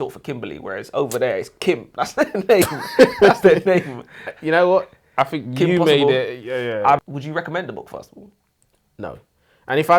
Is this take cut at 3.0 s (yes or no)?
no